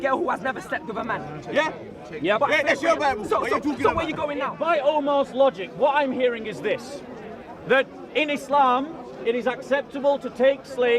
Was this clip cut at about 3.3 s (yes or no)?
no